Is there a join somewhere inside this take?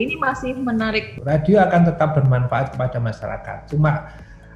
yes; 1 cut; at 1.1 s

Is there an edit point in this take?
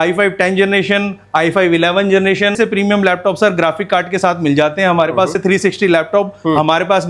yes; 2 cuts; at 2.6 s, 5.4 s

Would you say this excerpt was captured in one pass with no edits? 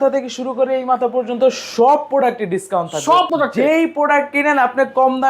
no; 1 cut; at 3.3 s

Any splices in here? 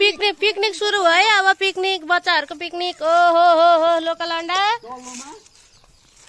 no; 0 cuts

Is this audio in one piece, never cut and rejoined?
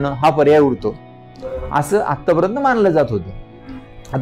yes; 0 cuts

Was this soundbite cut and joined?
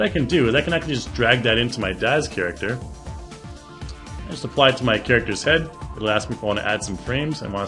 no; 0 cuts

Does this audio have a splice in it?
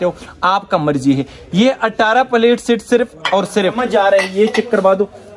yes; 1 cut; at 3.8 s

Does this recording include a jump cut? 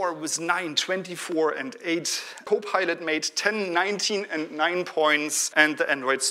yes; 2 cuts; at 2.4 s, 5.4 s

